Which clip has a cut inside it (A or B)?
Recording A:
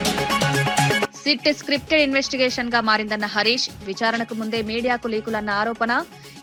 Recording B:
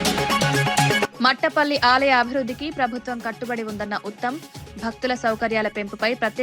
B